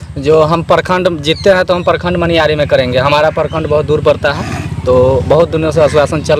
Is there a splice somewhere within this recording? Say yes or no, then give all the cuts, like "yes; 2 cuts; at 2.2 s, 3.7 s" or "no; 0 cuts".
no; 0 cuts